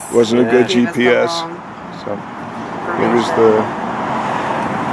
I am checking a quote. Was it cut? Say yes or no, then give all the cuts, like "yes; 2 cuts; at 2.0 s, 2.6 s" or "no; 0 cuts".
no; 0 cuts